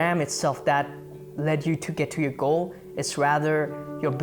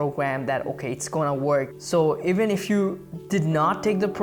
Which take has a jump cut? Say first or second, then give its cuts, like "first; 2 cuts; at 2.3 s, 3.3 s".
second; 1 cut; at 1.8 s